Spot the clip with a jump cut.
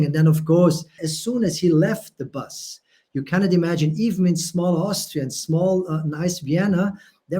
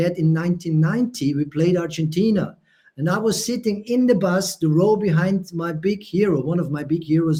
first; 1 cut; at 1.1 s

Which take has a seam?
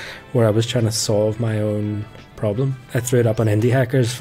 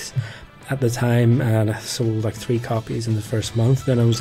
first; 1 cut; at 2.8 s

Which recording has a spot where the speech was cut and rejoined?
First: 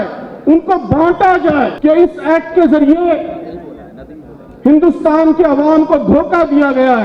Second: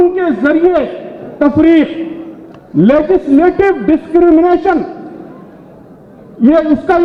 first; 1 cut; at 1.7 s

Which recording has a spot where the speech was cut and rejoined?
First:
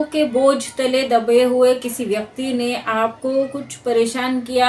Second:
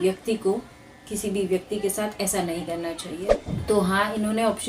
second; 1 cut; at 3.2 s

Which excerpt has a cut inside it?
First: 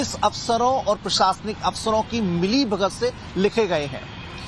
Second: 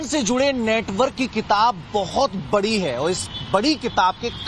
first; 1 cut; at 1.1 s

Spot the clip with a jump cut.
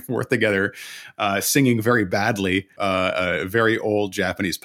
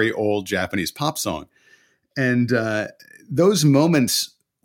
first; 1 cut; at 2.7 s

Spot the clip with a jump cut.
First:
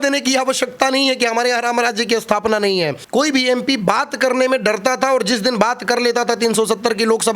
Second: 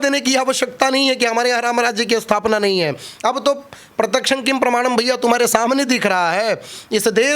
first; 1 cut; at 3.0 s

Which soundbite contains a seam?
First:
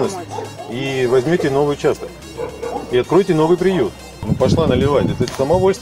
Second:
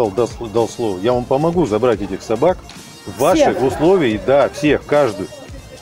first; 1 cut; at 4.2 s

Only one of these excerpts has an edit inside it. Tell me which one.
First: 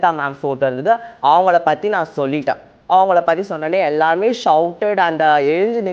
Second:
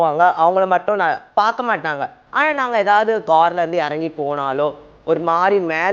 second; 2 cuts; at 1.2 s, 3.2 s

